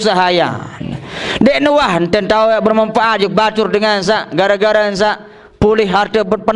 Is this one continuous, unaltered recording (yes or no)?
yes